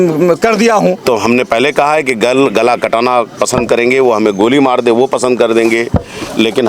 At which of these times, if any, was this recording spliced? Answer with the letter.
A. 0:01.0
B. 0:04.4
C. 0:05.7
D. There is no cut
A